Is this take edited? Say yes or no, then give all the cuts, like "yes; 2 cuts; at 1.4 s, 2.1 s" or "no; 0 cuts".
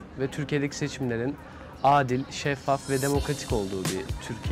no; 0 cuts